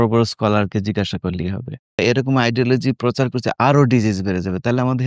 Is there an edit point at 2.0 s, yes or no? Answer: yes